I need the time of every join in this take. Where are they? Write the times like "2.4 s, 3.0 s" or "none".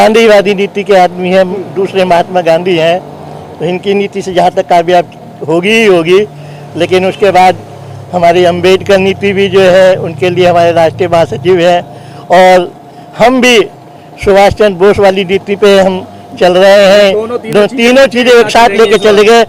none